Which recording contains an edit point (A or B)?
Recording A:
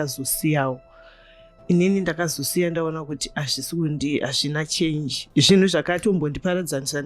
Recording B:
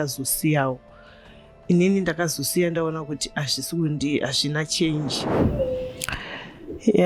B